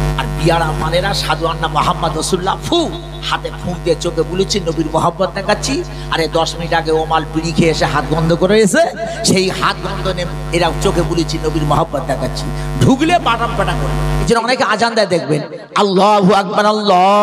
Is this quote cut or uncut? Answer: cut